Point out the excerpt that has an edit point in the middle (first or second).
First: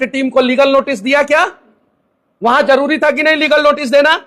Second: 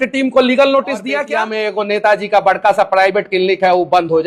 second